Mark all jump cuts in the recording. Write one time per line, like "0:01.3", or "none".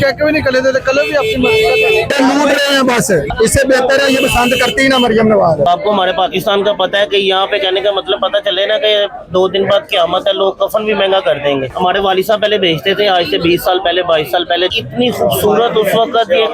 0:02.1
0:03.3
0:05.7
0:11.7
0:14.7